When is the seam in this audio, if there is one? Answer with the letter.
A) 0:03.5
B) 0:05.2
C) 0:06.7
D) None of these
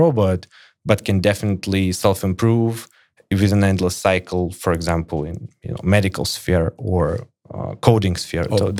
D